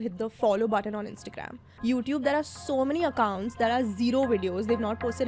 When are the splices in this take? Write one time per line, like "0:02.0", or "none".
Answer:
0:01.7